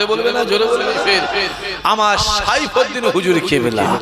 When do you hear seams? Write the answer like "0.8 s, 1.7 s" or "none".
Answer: 1.1 s